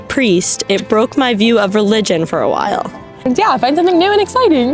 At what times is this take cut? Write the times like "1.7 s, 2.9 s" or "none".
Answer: 3.3 s